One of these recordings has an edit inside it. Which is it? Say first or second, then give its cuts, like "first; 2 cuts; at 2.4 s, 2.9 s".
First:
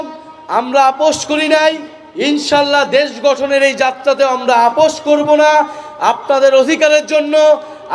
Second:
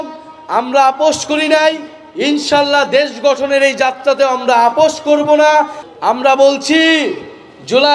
second; 1 cut; at 5.8 s